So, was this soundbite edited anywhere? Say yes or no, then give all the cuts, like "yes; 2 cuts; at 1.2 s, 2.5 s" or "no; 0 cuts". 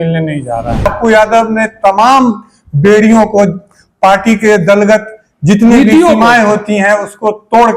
yes; 1 cut; at 0.9 s